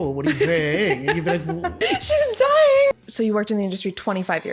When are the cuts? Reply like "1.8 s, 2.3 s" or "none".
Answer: 1.8 s, 2.9 s